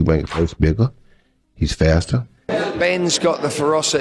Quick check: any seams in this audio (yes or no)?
yes